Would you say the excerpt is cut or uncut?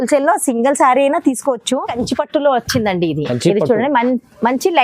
cut